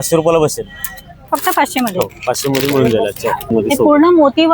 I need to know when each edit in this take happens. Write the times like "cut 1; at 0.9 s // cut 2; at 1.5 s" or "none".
cut 1; at 3.5 s